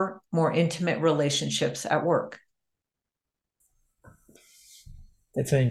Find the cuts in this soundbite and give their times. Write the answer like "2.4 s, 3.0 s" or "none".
none